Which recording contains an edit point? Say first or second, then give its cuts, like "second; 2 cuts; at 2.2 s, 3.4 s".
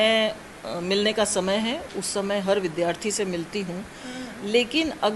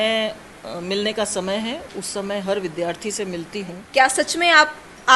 second; 1 cut; at 3.8 s